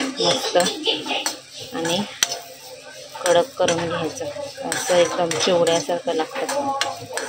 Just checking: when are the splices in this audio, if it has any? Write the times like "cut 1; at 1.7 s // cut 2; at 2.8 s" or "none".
none